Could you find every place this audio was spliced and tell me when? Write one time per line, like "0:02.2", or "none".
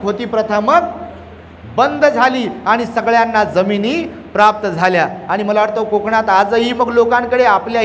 none